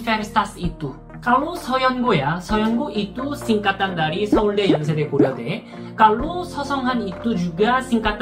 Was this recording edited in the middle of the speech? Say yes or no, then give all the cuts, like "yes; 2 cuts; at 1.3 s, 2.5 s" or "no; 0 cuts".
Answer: no; 0 cuts